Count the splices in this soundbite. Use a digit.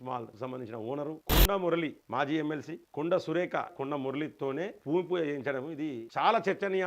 6